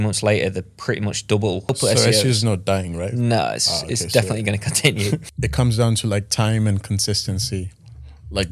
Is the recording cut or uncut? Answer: cut